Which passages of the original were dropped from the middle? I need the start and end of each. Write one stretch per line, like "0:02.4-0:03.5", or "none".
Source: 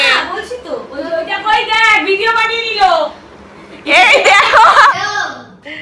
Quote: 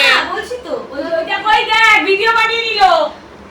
none